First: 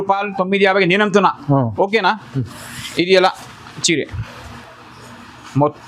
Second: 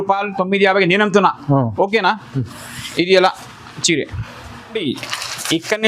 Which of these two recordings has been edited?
second; 1 cut; at 4.8 s

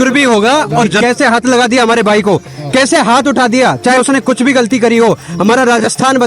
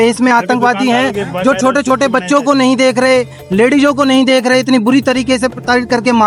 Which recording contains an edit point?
first; 1 cut; at 0.9 s

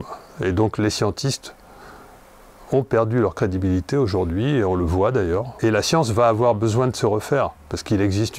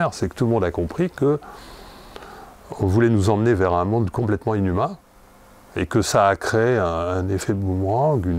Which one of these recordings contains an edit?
first; 1 cut; at 5.6 s

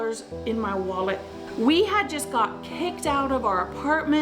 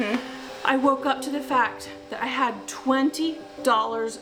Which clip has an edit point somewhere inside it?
first; 1 cut; at 1.4 s

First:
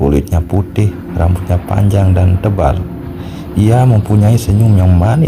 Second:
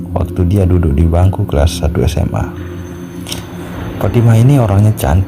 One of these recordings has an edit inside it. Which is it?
second; 2 cuts; at 2.4 s, 4.0 s

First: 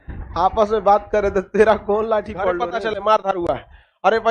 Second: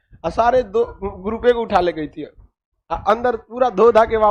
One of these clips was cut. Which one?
first; 1 cut; at 2.5 s

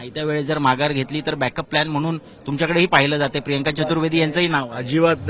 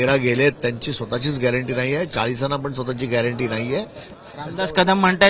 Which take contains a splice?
second; 1 cut; at 4.1 s

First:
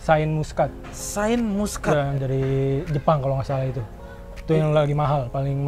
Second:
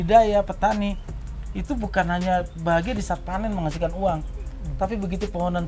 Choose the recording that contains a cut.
first; 1 cut; at 2.2 s

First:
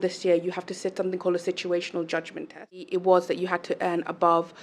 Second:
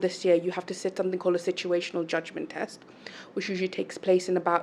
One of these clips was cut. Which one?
first; 1 cut; at 2.9 s

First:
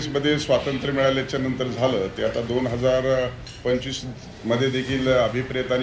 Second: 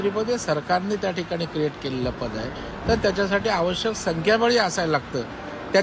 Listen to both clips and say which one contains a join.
second; 1 cut; at 2.7 s

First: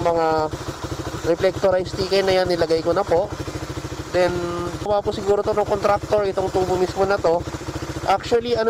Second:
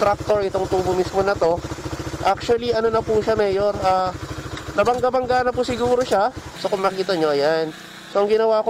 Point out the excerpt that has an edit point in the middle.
first; 2 cuts; at 1.1 s, 4.9 s

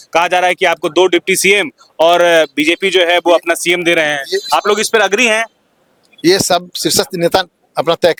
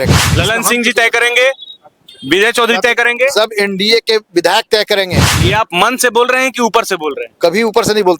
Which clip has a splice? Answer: second; 1 cut; at 5.4 s

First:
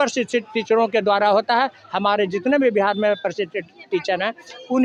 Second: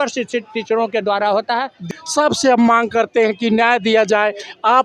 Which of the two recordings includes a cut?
second; 1 cut; at 1.9 s

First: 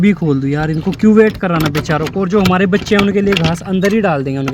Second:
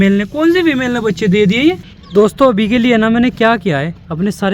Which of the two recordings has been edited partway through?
second; 1 cut; at 1.9 s

